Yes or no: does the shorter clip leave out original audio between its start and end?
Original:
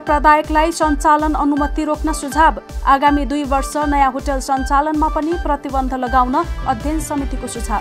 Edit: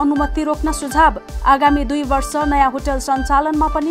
no